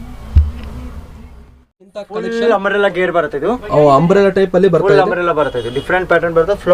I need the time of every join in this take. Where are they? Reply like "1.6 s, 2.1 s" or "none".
1.9 s